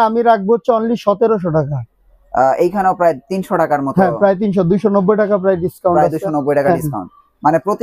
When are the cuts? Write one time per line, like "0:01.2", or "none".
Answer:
none